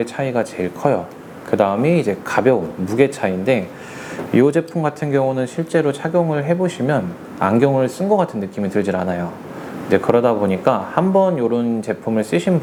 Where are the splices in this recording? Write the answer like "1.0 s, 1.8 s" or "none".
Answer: none